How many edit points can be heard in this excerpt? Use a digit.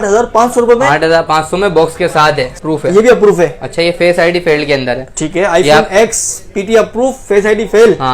1